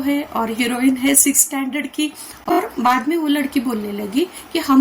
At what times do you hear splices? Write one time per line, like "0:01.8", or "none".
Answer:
0:02.6